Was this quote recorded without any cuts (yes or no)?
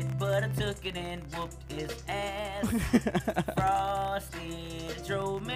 yes